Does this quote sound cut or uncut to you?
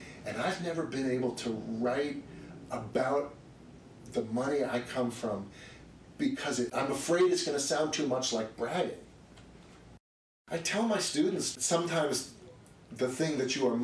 cut